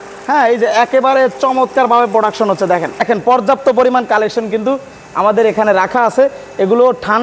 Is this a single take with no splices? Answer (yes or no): no